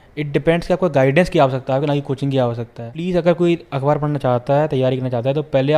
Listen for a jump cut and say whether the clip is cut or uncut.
cut